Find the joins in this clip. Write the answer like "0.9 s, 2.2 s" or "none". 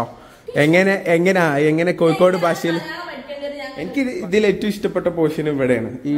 3.8 s